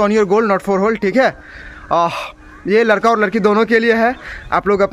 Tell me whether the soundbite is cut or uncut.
uncut